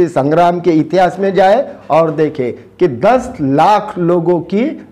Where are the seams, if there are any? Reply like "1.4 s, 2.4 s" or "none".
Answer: none